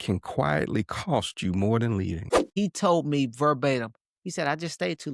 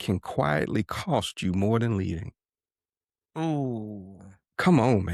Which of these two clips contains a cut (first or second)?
first